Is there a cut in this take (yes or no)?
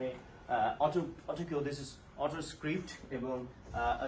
no